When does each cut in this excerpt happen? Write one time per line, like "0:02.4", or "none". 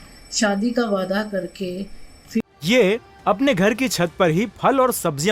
0:02.4